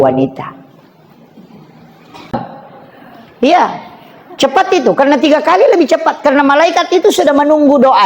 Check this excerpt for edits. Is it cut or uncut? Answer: cut